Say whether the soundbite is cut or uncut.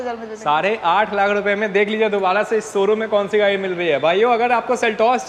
uncut